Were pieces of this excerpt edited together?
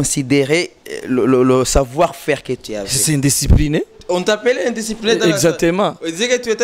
no; 0 cuts

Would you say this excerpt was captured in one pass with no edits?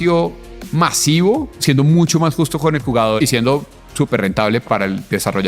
no; 2 cuts; at 1.5 s, 3.2 s

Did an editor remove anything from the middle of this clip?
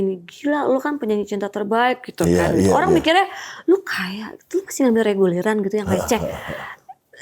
no; 0 cuts

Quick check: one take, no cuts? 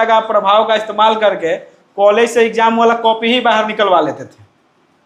yes; 0 cuts

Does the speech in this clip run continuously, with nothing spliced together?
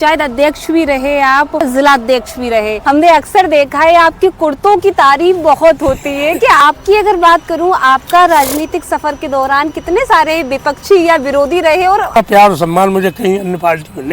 no; 4 cuts; at 1.7 s, 2.8 s, 6.6 s, 12.2 s

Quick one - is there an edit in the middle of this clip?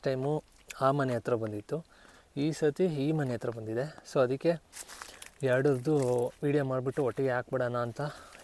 no; 0 cuts

